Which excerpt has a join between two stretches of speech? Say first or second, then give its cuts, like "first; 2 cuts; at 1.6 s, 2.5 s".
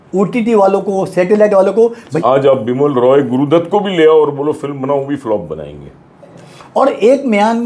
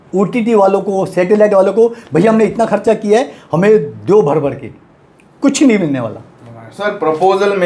first; 2 cuts; at 2.1 s, 6.4 s